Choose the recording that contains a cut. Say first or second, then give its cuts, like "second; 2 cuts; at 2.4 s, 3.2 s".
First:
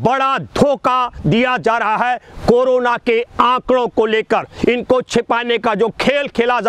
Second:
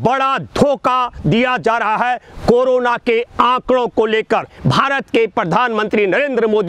second; 1 cut; at 4.5 s